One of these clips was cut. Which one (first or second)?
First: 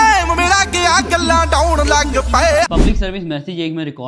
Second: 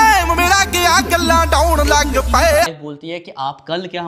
second